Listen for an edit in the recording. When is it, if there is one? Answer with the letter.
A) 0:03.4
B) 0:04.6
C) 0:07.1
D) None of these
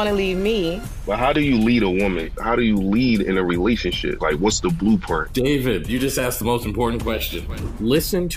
D